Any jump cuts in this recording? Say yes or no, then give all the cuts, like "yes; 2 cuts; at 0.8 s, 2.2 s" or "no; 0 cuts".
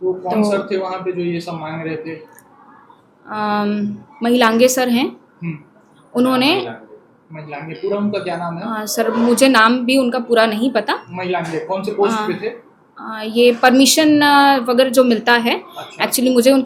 no; 0 cuts